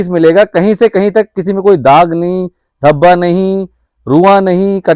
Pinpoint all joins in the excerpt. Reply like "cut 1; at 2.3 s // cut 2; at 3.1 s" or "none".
none